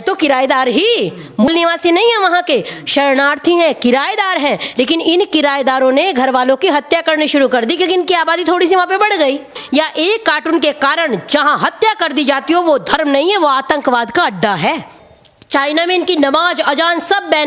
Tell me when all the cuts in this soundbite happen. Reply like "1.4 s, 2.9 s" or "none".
1.5 s, 9.6 s, 15.0 s